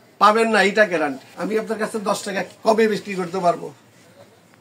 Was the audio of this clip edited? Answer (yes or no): yes